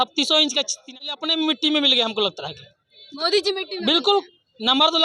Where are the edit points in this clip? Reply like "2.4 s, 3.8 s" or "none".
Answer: 1.0 s